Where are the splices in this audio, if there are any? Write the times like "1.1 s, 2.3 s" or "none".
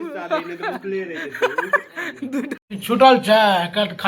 2.5 s